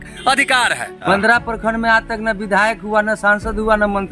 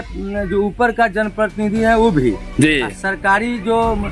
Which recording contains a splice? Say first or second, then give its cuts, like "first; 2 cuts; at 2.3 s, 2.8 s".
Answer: first; 1 cut; at 1.0 s